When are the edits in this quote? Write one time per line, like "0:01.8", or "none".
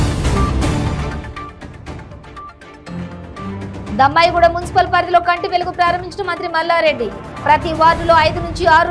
none

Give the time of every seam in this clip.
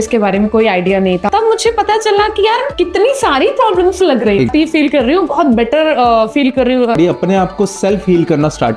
0:01.3
0:04.5
0:07.0

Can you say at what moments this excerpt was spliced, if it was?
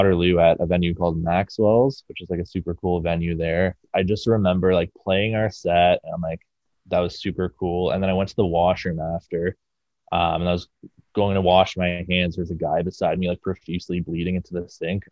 0:03.8

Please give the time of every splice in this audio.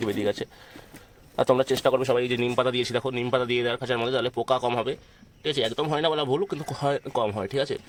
none

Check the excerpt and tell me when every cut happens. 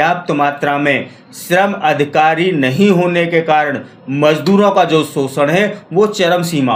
none

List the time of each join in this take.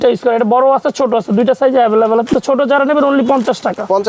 none

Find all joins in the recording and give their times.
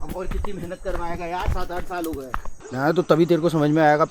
0:02.6

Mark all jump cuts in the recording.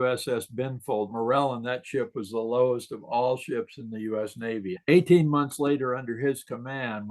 0:01.1
0:04.8

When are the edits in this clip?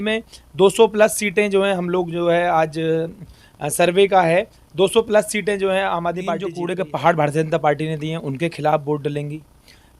0:06.6

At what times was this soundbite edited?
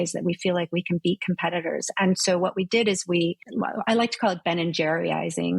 0:03.4

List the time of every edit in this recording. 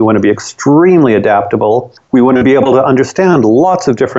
0:01.9

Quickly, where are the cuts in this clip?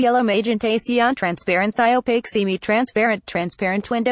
0:01.6

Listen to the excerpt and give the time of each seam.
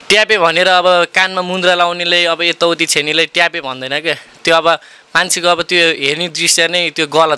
none

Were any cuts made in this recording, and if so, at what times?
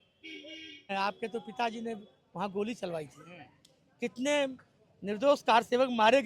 0:00.9

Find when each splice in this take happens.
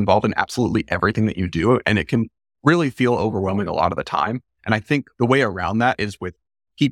0:05.1

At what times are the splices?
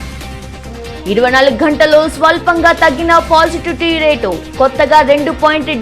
0:01.0

